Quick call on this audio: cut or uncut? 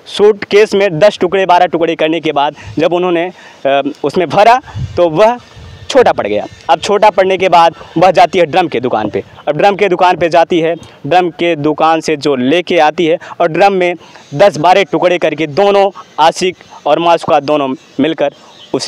uncut